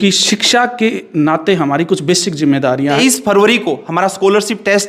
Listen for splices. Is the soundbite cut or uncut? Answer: cut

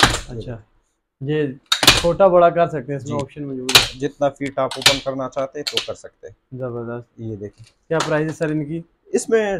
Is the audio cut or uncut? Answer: uncut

